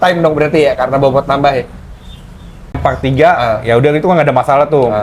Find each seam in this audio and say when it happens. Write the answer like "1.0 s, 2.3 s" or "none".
2.8 s